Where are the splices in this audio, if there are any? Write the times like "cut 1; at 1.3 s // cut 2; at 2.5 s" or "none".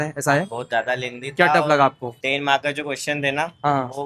cut 1; at 2.1 s